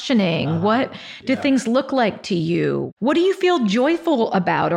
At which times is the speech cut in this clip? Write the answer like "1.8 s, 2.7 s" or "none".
2.9 s

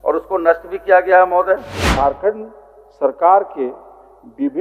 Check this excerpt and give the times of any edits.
1.9 s

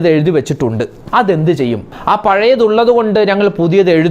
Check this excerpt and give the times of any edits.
1.0 s, 1.9 s

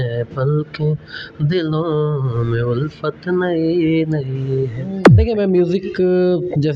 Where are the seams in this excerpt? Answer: 5.1 s

